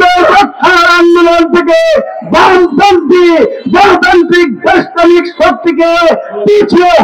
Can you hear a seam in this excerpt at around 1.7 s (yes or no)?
no